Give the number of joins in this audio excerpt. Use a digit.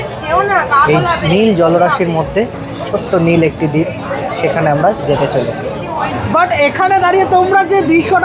1